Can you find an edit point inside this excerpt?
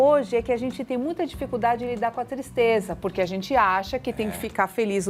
no; 0 cuts

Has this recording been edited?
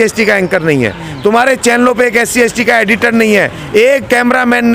no; 0 cuts

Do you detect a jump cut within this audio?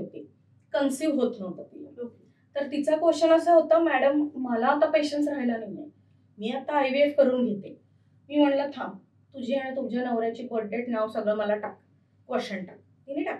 no; 0 cuts

